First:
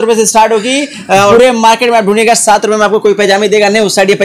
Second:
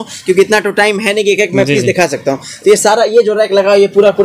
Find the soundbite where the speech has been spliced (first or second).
first